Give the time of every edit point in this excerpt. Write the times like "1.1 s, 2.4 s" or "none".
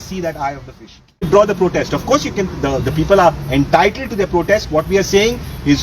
1.1 s